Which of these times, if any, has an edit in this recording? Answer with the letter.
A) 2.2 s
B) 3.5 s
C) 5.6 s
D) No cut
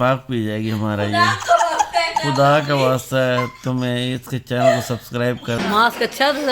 C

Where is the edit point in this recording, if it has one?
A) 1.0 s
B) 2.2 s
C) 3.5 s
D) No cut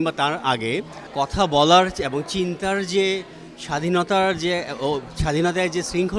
A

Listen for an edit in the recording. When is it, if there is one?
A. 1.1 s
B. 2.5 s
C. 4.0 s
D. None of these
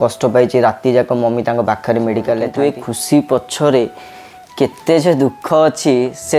B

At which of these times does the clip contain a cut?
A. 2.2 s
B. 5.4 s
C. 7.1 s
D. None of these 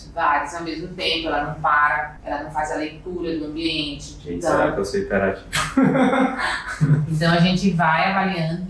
A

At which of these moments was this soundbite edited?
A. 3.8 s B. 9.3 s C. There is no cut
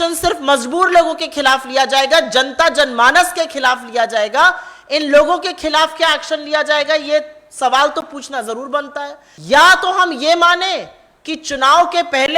B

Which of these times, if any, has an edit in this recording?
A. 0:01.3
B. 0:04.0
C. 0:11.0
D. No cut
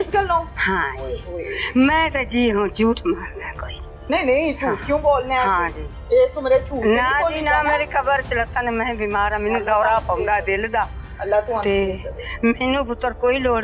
D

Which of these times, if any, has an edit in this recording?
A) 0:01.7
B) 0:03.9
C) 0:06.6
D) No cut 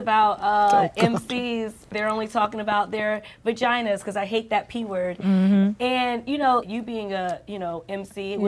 C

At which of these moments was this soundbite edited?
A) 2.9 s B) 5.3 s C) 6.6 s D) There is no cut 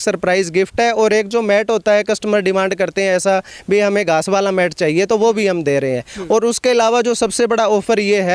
D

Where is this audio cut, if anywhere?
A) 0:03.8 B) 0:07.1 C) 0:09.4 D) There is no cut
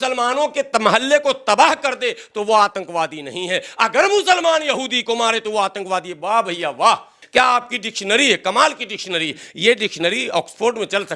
B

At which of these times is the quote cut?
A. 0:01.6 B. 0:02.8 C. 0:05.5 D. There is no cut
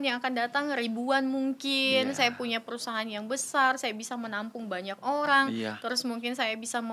D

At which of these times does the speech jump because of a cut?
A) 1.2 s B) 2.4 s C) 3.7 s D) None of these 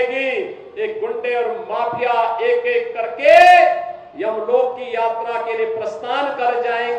D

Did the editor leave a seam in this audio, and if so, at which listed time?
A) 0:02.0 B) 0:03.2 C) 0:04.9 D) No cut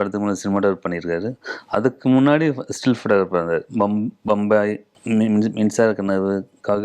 C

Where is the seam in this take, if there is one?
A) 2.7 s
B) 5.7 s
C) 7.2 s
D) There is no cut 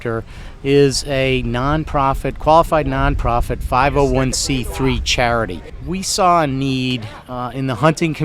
B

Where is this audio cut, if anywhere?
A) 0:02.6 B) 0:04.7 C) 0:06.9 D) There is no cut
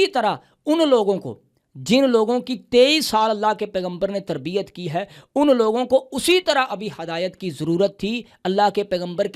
D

